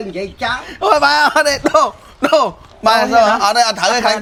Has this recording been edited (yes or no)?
no